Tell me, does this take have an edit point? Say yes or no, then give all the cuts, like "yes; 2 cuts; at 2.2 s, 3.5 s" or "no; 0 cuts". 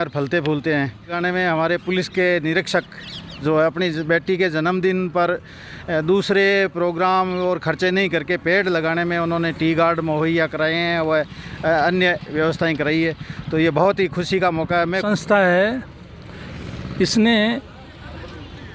yes; 2 cuts; at 1.2 s, 15.0 s